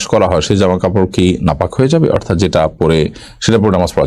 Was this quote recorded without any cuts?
yes; 0 cuts

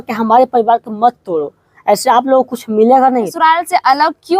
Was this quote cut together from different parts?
yes; 1 cut; at 3.3 s

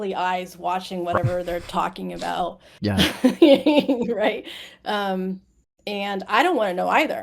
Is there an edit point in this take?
no; 0 cuts

